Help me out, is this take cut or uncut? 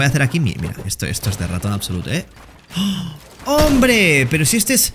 uncut